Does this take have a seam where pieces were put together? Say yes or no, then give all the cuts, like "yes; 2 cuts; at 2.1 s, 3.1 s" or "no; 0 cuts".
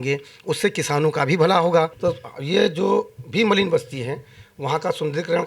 yes; 1 cut; at 1.9 s